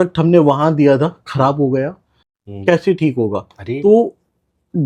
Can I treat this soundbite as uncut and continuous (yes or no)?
yes